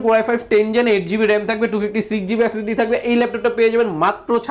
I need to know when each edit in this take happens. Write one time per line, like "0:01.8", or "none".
none